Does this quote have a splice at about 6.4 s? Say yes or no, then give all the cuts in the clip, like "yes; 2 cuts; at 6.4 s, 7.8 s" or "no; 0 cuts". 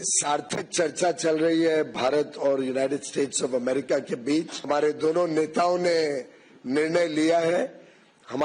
no; 1 cut; at 4.7 s